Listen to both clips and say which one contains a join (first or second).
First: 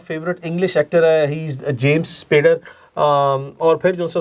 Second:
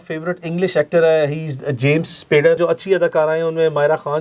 second